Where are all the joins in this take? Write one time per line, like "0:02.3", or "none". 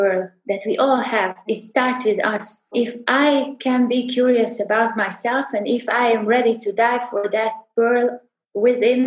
0:01.4
0:02.7